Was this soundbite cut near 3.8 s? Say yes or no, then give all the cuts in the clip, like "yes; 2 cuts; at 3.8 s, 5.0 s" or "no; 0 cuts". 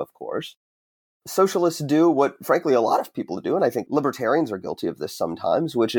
yes; 2 cuts; at 1.1 s, 3.8 s